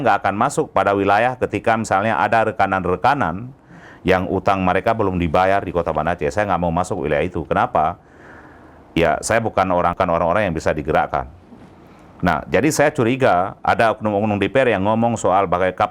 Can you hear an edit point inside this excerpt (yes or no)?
yes